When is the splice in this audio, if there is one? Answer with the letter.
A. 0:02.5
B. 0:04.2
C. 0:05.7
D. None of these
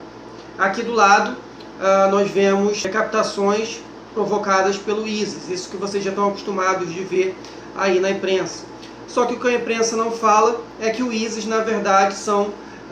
D